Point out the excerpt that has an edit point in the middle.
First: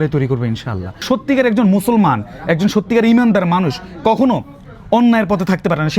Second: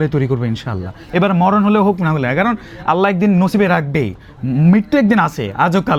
first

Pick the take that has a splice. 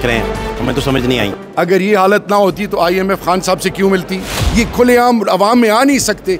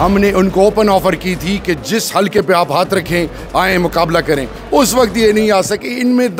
first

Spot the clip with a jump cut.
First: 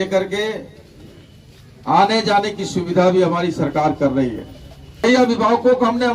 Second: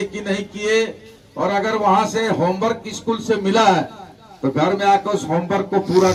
first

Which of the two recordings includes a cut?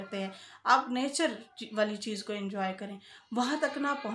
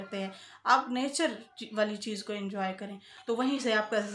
second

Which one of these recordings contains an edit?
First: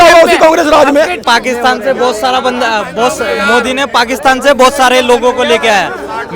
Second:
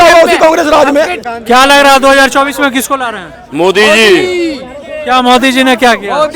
first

